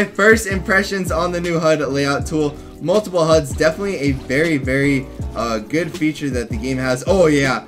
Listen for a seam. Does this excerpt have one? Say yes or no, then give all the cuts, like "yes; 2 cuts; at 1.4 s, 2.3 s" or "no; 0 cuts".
no; 0 cuts